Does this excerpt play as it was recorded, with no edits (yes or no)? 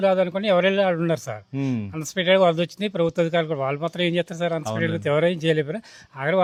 yes